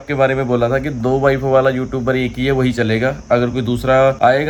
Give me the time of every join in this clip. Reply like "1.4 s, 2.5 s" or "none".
none

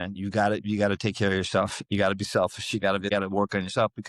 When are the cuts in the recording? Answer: 3.1 s

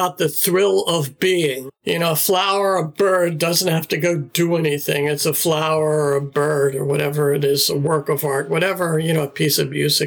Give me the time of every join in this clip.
1.7 s

